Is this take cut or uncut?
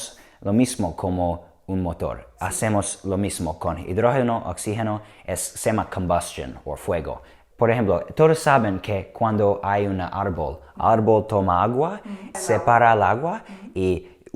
cut